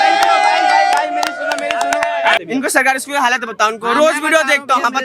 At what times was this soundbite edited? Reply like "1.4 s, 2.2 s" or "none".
2.4 s